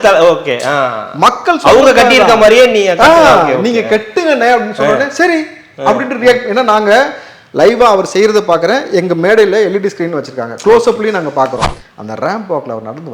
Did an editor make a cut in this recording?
yes; 1 cut; at 11.7 s

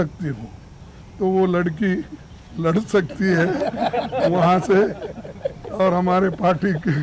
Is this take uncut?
yes; 0 cuts

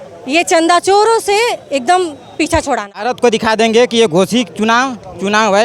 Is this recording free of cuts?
no; 1 cut; at 3.0 s

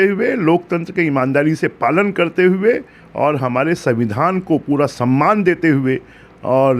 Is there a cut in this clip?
no; 0 cuts

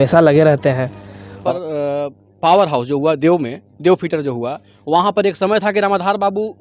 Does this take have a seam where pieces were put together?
yes; 1 cut; at 1.4 s

